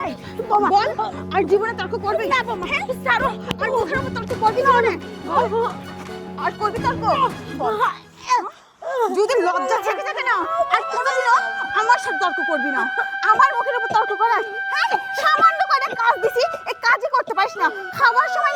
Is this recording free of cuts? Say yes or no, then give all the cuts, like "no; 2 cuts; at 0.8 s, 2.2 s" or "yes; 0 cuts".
yes; 0 cuts